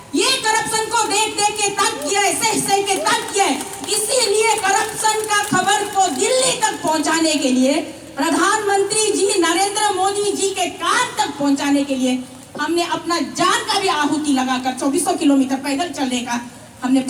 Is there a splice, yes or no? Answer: no